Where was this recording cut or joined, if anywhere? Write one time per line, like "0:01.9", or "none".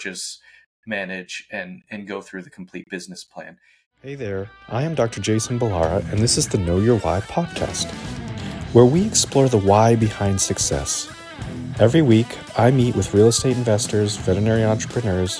0:03.9